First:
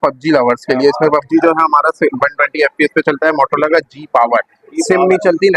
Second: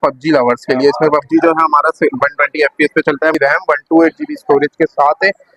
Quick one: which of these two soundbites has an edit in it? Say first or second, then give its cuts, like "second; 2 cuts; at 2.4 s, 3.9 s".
second; 1 cut; at 3.3 s